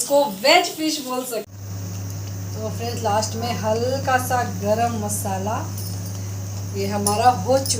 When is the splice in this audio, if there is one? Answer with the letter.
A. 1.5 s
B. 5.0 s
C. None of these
A